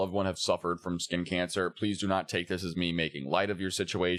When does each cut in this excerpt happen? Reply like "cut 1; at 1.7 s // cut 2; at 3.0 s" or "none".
none